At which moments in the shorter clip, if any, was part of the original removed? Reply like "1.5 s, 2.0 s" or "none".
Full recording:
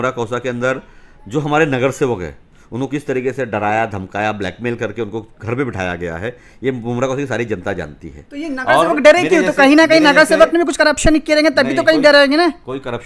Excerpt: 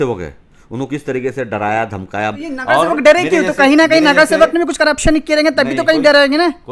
2.4 s